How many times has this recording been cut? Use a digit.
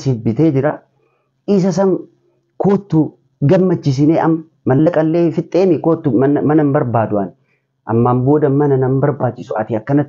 0